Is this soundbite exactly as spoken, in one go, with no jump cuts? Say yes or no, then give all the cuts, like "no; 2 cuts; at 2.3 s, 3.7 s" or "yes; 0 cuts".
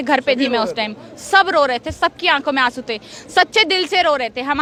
yes; 0 cuts